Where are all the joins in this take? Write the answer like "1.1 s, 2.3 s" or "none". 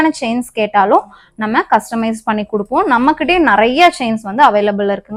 none